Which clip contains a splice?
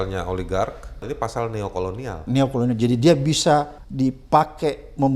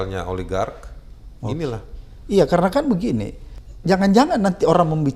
first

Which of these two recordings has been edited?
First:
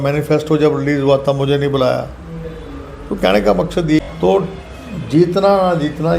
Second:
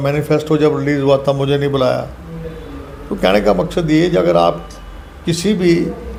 first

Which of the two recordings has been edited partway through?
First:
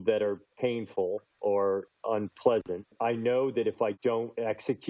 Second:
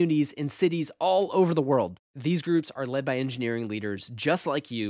first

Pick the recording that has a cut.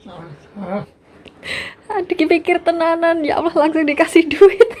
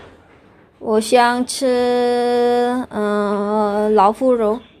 first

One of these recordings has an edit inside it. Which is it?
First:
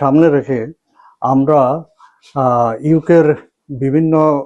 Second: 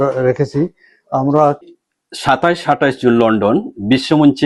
second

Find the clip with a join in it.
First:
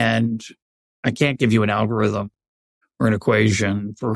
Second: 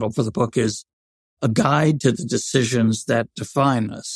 first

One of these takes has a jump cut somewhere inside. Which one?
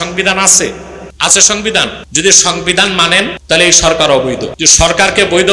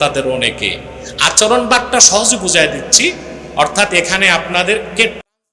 first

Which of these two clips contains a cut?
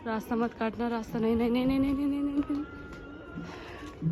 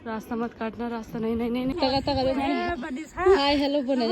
second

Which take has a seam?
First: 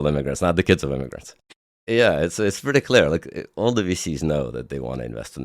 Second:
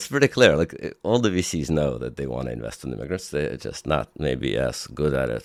first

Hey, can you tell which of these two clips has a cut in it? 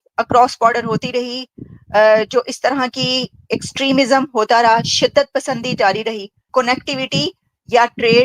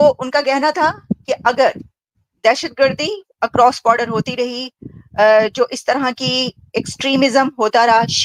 first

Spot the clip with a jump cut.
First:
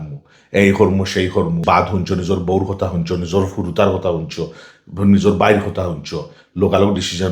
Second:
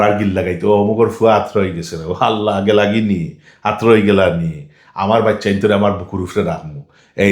first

